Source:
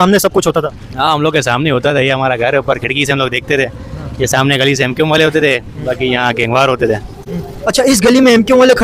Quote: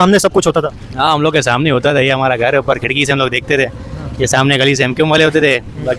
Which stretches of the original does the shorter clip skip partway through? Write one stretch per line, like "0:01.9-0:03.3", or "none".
none